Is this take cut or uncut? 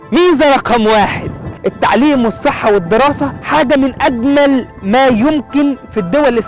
uncut